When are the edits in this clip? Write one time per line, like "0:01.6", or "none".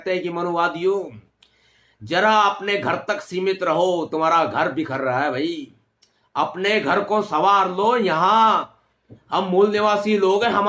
none